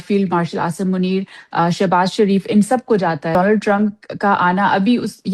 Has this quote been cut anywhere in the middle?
yes; 1 cut; at 3.4 s

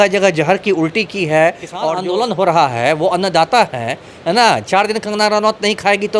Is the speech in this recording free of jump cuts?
no; 1 cut; at 1.9 s

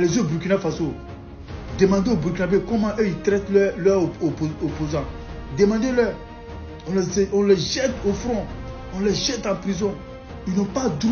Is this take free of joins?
yes; 0 cuts

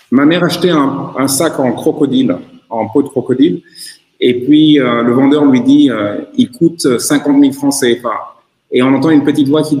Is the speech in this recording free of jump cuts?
yes; 0 cuts

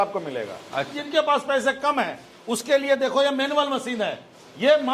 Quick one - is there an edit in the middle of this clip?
yes; 1 cut; at 0.9 s

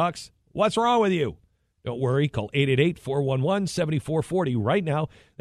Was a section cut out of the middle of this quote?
no; 0 cuts

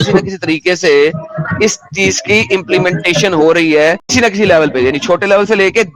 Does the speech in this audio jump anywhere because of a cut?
no; 0 cuts

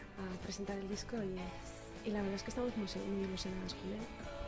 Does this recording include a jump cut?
yes; 1 cut; at 2.9 s

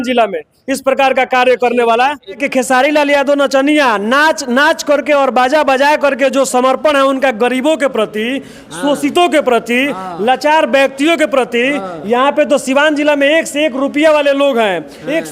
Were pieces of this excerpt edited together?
yes; 1 cut; at 2.3 s

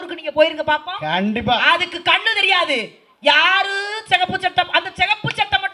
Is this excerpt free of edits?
yes; 0 cuts

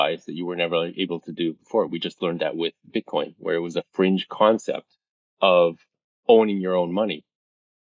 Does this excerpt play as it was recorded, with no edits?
yes; 0 cuts

